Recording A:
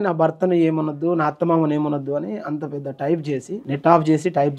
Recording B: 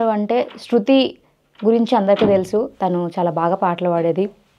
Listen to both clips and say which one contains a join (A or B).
A